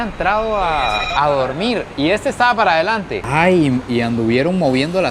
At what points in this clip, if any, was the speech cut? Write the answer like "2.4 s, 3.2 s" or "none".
1.1 s, 3.2 s